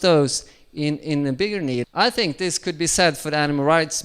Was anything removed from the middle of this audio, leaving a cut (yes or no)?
yes